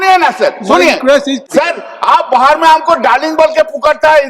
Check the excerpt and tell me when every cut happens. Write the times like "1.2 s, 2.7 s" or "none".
1.4 s